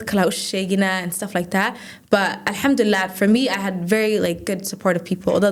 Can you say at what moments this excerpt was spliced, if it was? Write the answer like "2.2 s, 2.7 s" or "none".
none